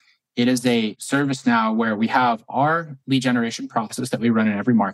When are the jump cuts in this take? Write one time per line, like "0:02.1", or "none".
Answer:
0:01.0